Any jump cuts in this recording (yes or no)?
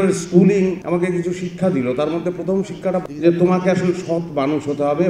yes